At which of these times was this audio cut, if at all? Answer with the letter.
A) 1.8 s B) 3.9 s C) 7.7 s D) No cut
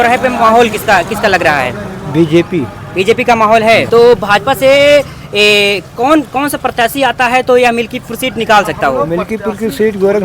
B